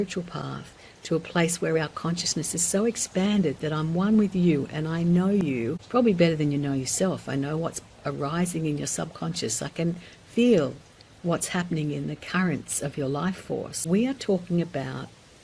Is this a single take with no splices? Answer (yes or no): no